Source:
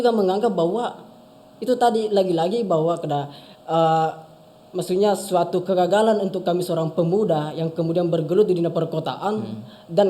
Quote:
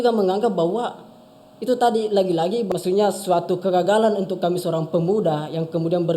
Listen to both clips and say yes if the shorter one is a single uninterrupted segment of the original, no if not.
no